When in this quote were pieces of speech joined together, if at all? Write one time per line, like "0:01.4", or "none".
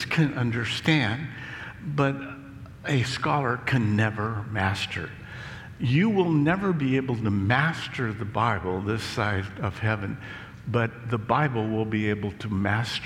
none

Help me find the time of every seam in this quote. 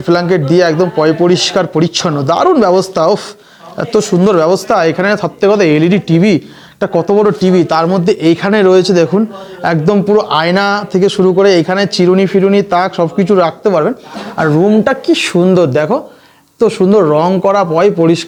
none

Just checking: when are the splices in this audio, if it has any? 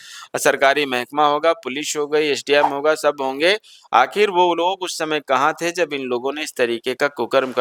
none

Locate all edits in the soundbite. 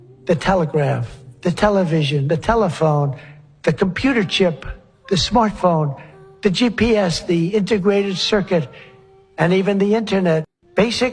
none

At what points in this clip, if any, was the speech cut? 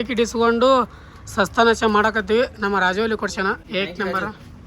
0:03.6

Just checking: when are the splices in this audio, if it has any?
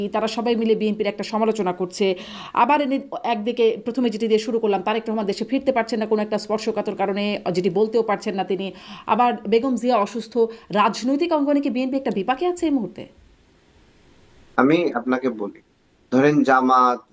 none

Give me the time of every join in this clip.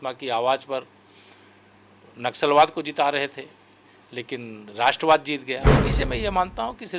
0:05.8

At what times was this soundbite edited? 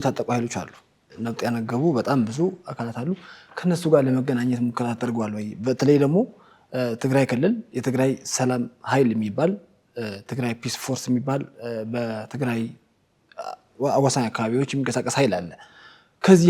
0:01.0

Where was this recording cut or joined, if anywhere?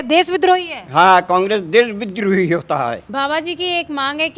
0:03.1

